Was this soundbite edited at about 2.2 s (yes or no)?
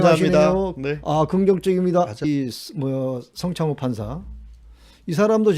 yes